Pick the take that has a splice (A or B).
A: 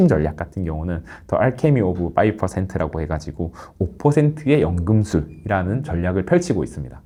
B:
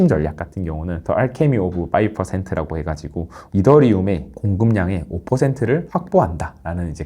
B